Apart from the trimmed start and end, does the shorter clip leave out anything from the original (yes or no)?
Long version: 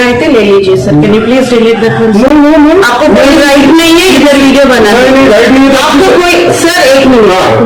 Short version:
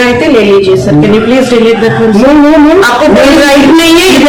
no